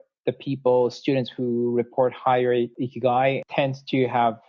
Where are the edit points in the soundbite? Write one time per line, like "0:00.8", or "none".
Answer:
0:02.7
0:03.5